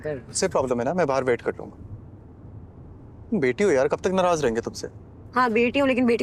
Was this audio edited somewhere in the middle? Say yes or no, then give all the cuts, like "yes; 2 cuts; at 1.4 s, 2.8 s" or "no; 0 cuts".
no; 0 cuts